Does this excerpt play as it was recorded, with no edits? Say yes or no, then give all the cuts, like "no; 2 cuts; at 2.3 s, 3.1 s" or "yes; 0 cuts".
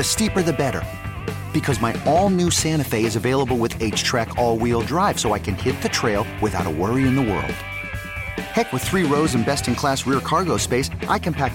yes; 0 cuts